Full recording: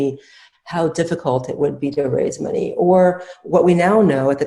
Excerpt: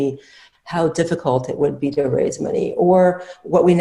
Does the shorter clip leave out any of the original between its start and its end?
no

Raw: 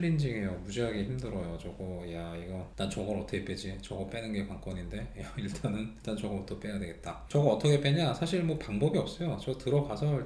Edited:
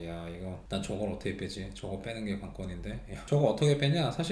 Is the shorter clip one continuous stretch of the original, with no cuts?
no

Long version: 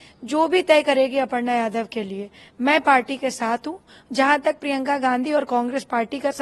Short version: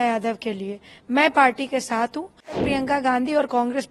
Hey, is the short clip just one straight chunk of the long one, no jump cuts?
no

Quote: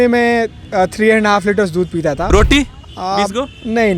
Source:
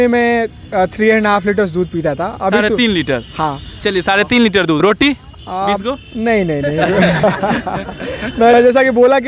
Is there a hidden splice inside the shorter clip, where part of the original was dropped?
yes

